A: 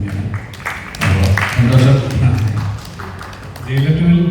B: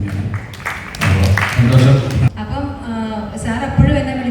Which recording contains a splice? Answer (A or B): B